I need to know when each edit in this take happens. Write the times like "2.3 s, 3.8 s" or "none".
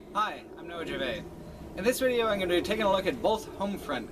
none

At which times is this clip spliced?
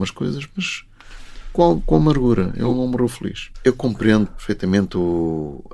3.5 s, 4.4 s

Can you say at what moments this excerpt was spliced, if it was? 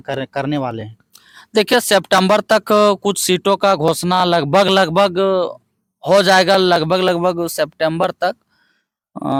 none

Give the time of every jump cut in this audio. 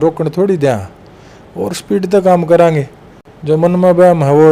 none

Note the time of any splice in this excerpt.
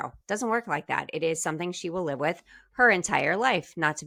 none

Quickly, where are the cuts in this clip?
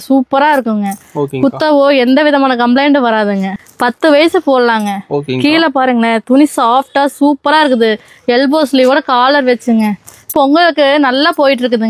3.5 s, 10.3 s

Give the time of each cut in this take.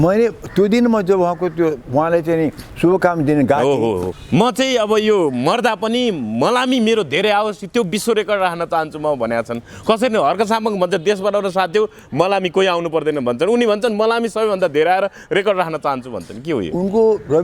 4.1 s

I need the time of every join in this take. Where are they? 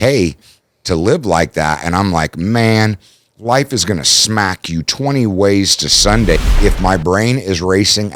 6.4 s

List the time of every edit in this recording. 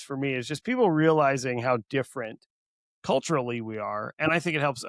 none

